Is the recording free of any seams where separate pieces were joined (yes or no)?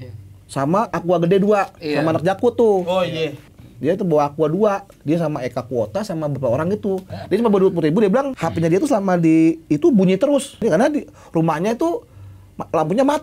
no